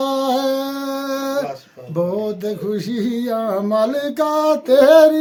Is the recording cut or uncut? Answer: uncut